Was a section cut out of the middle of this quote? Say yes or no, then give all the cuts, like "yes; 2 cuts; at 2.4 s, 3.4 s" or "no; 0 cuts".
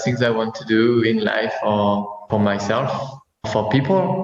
yes; 2 cuts; at 2.3 s, 3.5 s